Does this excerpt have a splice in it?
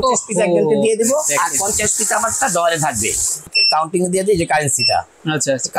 yes; 1 cut; at 3.5 s

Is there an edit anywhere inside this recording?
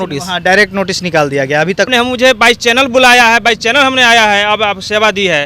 yes; 1 cut; at 1.9 s

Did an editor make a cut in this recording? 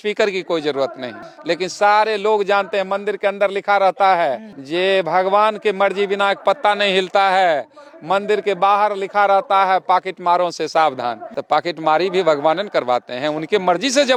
no; 0 cuts

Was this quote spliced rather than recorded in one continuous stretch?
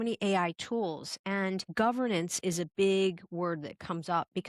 yes; 1 cut; at 1.7 s

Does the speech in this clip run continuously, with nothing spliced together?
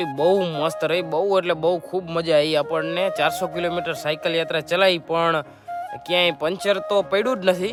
yes; 0 cuts

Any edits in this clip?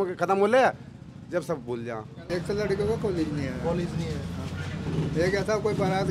yes; 1 cut; at 2.1 s

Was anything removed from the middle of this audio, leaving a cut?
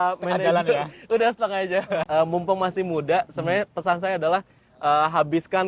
yes; 1 cut; at 2.1 s

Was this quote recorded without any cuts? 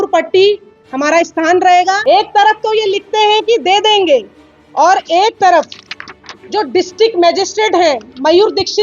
no; 1 cut; at 2.0 s

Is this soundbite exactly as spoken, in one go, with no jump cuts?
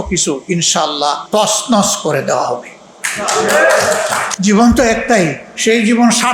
no; 3 cuts; at 1.2 s, 4.3 s, 5.5 s

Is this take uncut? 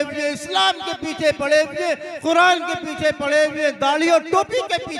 yes; 0 cuts

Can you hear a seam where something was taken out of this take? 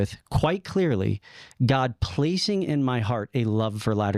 no; 0 cuts

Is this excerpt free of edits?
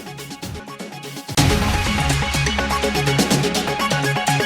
no; 1 cut; at 1.3 s

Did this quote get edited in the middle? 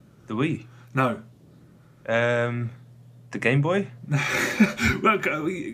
no; 0 cuts

